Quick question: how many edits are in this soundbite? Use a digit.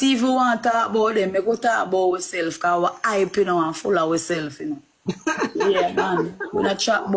0